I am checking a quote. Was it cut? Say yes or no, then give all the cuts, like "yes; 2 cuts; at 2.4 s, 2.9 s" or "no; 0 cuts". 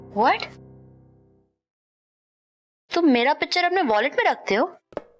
no; 0 cuts